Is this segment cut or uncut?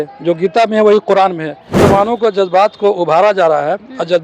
cut